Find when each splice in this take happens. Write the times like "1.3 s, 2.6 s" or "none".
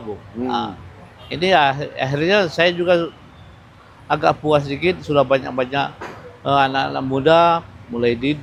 none